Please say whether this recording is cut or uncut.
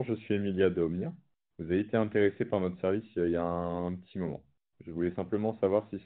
uncut